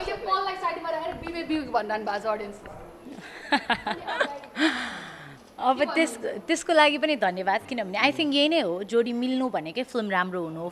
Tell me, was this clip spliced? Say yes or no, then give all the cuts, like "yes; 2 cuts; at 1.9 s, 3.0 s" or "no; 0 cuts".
no; 0 cuts